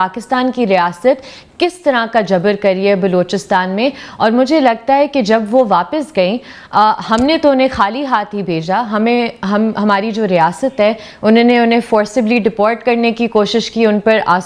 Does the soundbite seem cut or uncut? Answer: uncut